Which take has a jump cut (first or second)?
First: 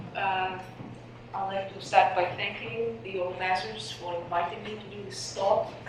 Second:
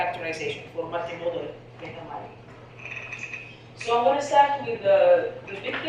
second